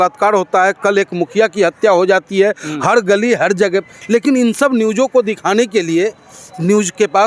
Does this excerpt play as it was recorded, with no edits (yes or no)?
yes